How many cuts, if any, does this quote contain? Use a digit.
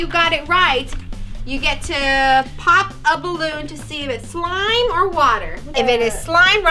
1